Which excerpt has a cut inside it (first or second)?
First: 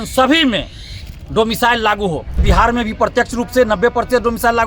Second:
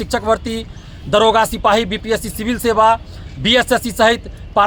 first